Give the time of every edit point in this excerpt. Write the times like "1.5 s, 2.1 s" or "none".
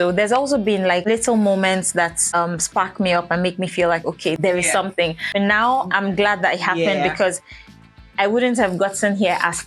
1.0 s, 2.2 s, 4.4 s, 5.2 s